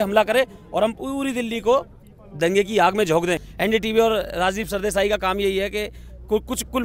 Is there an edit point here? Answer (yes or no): yes